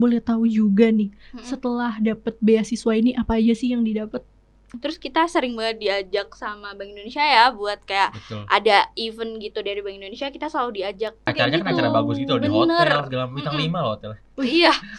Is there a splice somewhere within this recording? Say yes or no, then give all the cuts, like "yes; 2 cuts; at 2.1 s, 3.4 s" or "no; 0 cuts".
yes; 2 cuts; at 4.7 s, 11.3 s